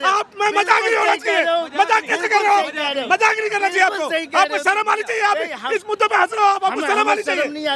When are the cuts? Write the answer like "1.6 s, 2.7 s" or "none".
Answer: none